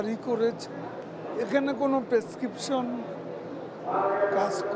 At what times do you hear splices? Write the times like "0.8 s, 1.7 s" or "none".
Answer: 1.0 s